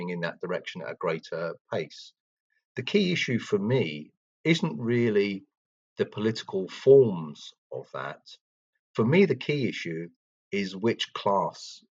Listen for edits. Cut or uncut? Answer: cut